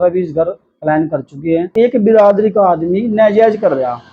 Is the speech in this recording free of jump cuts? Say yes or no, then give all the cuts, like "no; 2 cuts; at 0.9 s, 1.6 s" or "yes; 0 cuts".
no; 1 cut; at 1.7 s